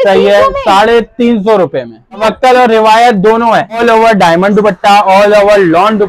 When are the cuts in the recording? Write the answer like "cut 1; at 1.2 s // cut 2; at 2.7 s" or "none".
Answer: cut 1; at 2.2 s // cut 2; at 3.8 s